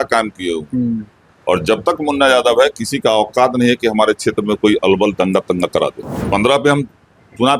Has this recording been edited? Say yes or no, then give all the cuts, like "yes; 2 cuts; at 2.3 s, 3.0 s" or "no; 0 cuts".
yes; 1 cut; at 6.1 s